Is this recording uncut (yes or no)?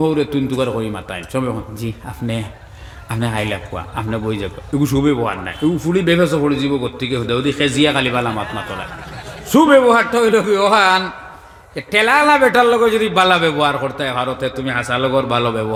yes